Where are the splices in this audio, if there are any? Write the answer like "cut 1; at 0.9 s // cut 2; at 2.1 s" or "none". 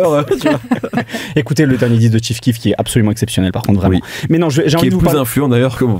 none